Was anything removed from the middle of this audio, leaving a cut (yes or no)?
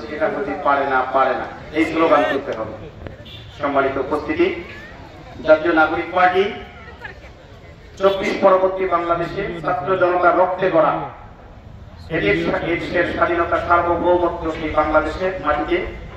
no